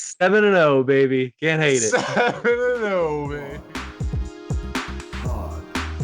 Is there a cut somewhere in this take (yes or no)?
yes